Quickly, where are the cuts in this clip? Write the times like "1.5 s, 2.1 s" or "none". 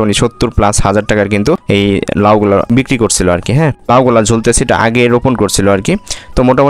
3.9 s

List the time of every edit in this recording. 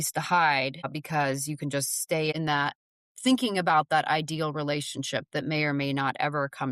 2.3 s

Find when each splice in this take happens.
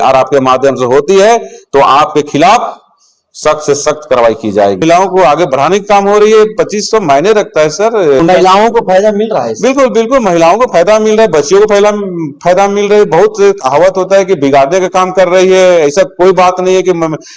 4.8 s, 8.2 s

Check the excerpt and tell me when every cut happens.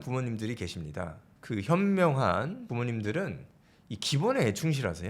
1.3 s, 2.7 s

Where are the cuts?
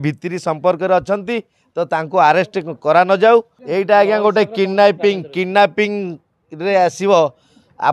3.6 s

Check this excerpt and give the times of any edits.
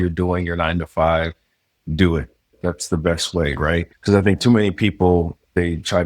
3.9 s

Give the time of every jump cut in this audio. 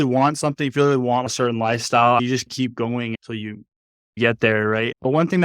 1.3 s, 4.2 s

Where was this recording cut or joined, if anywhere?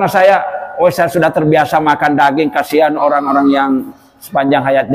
none

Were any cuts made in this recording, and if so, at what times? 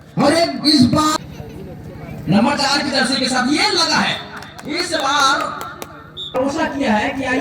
1.1 s, 6.3 s

